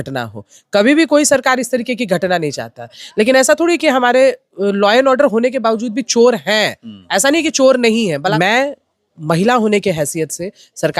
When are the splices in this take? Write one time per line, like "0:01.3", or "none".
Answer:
0:08.2